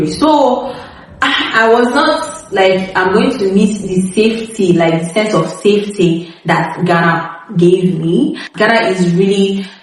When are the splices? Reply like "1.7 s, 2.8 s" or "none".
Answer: 8.4 s